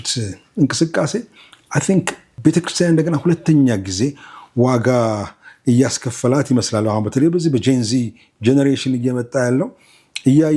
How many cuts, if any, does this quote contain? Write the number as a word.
one